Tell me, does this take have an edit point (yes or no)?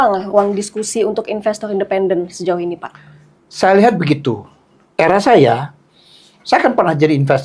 no